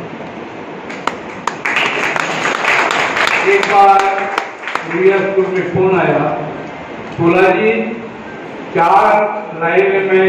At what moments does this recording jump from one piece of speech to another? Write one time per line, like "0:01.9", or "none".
none

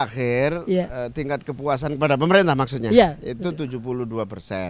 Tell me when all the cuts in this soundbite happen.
none

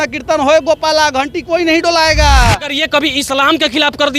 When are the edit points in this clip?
0:02.8

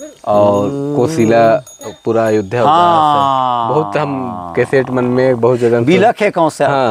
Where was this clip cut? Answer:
none

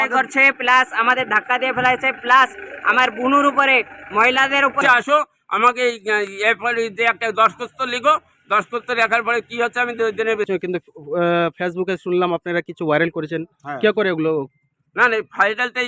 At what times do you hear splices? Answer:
0:04.8
0:10.5

